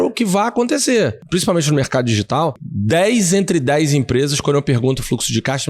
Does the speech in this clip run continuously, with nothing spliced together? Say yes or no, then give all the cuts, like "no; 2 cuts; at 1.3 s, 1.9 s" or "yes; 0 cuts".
no; 2 cuts; at 1.2 s, 2.7 s